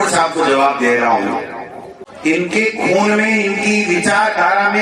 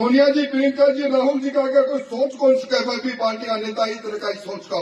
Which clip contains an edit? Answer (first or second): first